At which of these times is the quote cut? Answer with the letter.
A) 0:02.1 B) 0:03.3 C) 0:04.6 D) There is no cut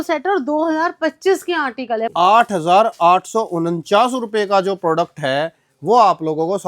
A